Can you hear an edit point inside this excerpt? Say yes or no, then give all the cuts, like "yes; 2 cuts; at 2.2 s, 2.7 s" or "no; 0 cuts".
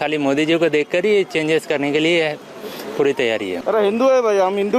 yes; 1 cut; at 3.6 s